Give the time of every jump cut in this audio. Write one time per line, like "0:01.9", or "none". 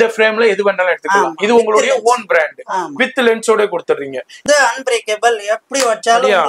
0:04.4